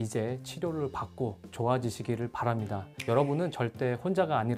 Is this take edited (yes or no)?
no